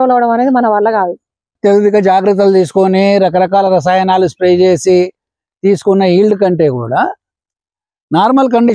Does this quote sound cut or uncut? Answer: cut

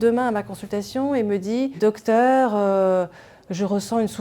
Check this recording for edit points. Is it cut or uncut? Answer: cut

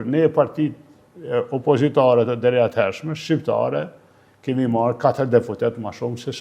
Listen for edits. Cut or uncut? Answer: uncut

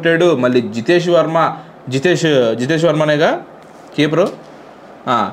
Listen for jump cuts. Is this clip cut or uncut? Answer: uncut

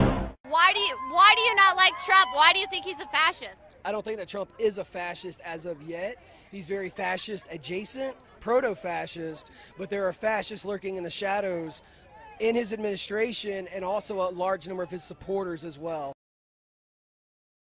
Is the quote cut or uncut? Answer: cut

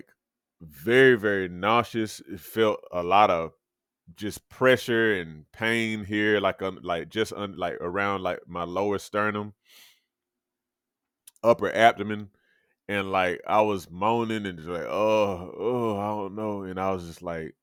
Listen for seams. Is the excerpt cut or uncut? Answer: uncut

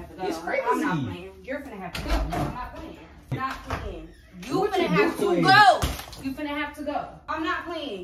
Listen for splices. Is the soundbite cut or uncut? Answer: cut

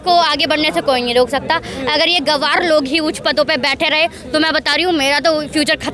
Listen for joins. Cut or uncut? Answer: uncut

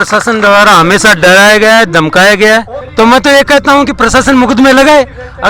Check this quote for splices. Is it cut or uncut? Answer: cut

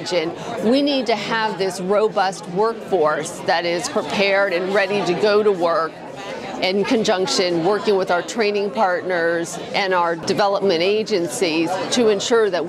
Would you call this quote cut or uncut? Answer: cut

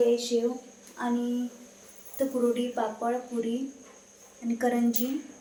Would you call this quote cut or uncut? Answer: uncut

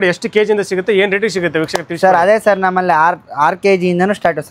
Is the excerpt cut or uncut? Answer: uncut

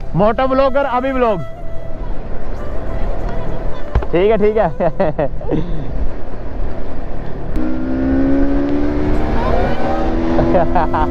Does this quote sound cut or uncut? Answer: cut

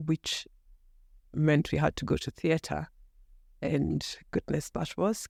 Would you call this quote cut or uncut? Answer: uncut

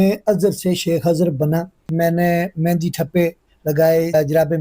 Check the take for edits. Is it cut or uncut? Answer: cut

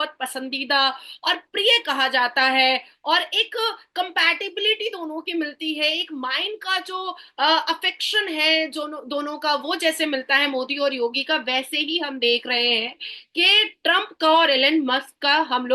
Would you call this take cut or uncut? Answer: uncut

